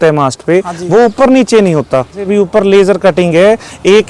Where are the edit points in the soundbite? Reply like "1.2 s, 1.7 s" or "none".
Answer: 2.2 s